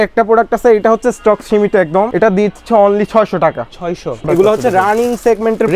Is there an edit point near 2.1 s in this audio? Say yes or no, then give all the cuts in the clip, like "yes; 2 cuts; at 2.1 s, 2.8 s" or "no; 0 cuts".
yes; 2 cuts; at 2.1 s, 4.2 s